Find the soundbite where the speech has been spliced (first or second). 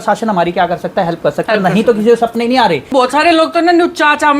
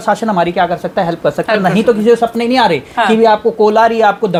first